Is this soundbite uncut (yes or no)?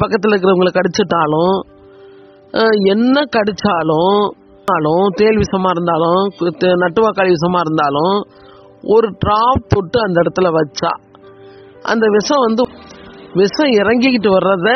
no